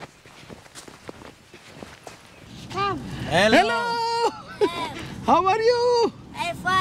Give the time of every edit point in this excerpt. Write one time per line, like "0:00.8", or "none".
0:02.7